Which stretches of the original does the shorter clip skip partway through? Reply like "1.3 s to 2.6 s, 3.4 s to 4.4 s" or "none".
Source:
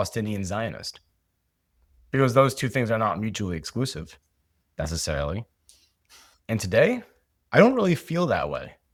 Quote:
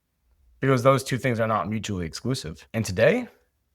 4.1 s to 6.3 s